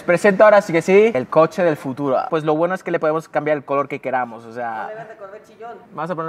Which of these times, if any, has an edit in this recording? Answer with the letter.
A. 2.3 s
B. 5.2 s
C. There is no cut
C